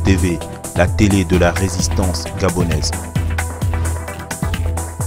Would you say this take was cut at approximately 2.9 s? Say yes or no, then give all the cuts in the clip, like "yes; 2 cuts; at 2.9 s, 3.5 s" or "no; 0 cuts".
yes; 1 cut; at 2.9 s